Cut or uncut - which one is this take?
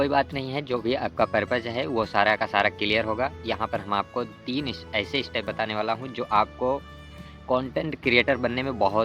uncut